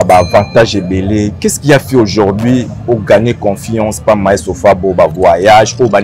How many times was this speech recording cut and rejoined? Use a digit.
0